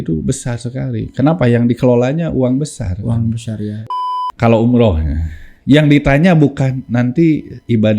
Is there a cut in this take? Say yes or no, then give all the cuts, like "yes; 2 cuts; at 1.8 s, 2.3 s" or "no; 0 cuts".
yes; 1 cut; at 3.8 s